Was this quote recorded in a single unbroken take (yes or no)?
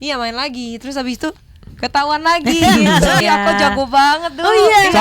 no